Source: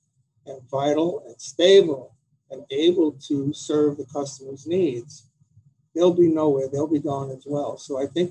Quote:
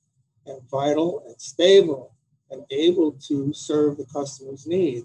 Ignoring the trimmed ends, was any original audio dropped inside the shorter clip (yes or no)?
no